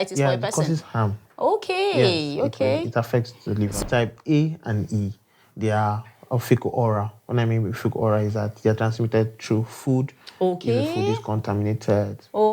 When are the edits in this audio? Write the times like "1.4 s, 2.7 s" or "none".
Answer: 3.7 s